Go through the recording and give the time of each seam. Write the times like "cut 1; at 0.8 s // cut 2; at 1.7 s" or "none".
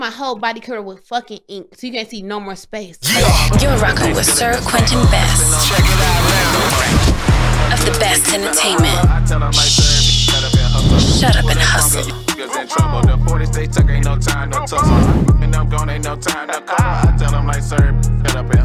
cut 1; at 3.0 s

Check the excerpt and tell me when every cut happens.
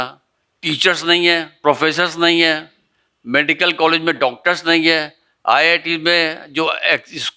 cut 1; at 1.5 s

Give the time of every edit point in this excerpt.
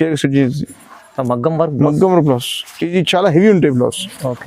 none

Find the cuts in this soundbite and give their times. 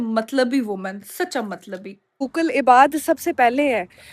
cut 1; at 2.2 s

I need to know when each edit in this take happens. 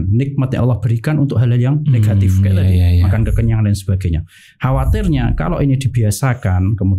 none

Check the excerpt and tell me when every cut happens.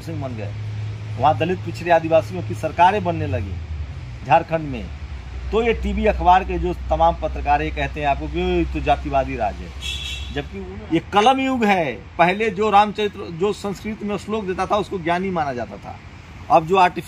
cut 1; at 10.5 s

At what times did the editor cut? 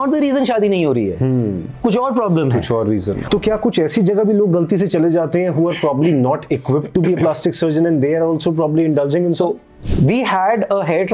cut 1; at 3.2 s // cut 2; at 9.7 s

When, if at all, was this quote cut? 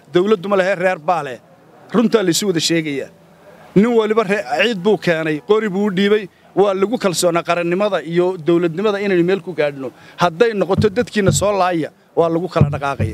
none

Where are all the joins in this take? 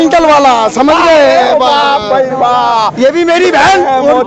none

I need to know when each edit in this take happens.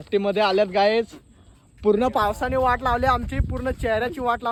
none

